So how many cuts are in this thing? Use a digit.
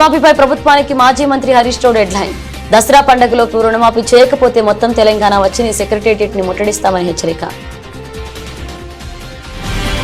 0